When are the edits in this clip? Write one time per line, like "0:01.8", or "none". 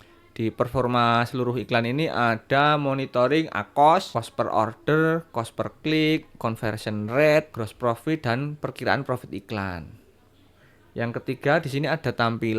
0:04.1
0:07.6

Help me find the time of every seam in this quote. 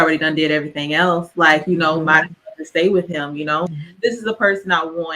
0:03.7

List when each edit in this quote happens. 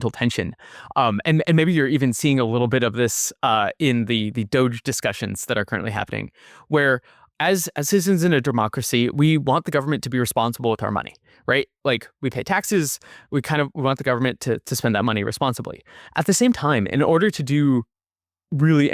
0:07.3

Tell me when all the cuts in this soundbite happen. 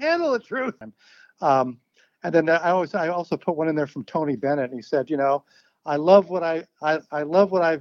0:00.9

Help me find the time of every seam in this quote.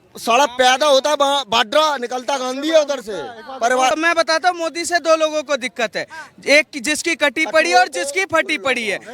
0:03.9

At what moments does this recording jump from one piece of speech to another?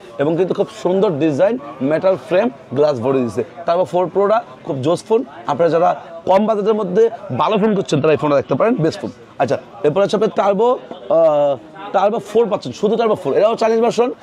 none

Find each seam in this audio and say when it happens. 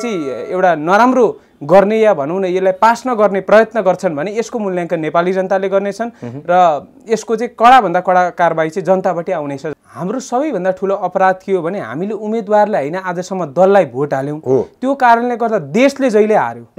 0:09.8

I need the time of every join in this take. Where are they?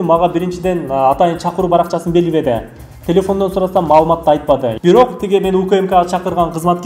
0:04.7

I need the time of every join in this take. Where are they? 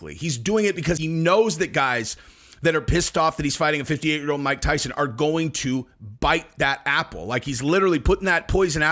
0:01.0

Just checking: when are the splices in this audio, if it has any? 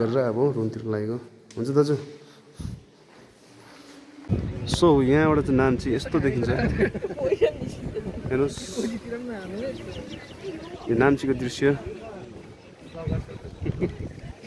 0:04.2

